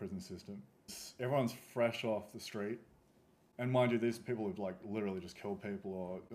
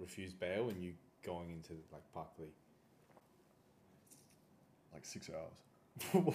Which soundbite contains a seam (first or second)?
first